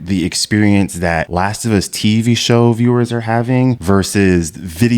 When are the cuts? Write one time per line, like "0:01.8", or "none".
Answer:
0:01.3
0:03.8